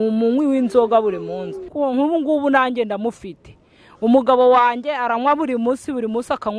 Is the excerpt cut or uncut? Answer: cut